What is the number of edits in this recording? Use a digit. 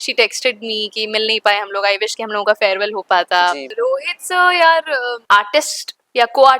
2